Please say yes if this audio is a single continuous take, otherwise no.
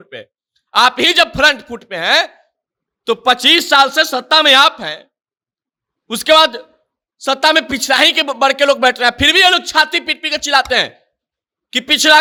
yes